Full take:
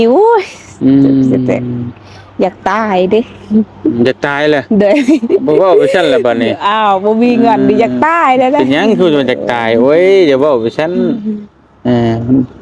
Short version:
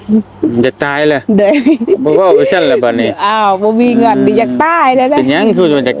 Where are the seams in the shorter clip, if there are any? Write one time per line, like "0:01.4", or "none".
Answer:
none